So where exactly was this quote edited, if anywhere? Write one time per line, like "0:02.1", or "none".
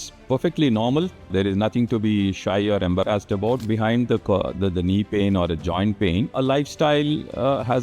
0:01.3
0:03.6
0:06.3